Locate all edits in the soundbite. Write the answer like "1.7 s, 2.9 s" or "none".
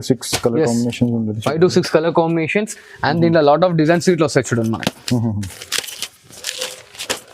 none